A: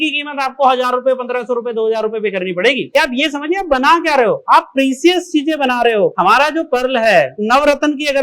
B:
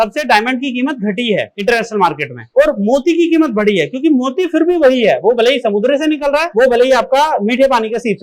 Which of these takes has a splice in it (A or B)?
A